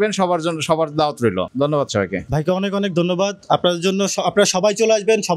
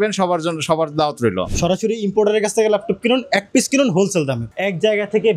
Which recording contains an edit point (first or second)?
second